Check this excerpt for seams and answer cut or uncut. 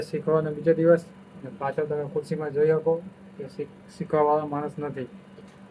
uncut